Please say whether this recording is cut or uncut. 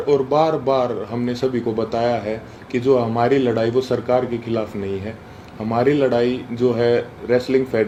uncut